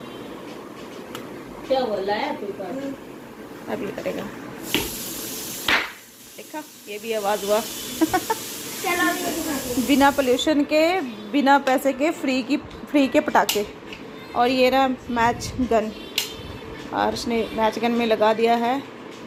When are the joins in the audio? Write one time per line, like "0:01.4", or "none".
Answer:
none